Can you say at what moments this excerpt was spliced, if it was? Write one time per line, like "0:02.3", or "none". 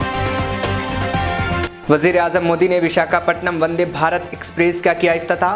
0:01.6